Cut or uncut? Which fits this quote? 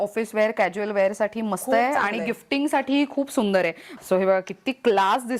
cut